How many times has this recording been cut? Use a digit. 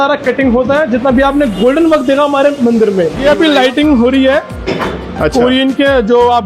1